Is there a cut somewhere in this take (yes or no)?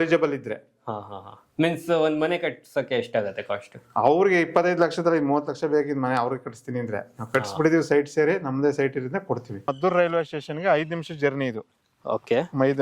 yes